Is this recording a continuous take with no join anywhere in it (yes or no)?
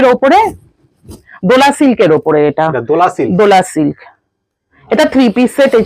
yes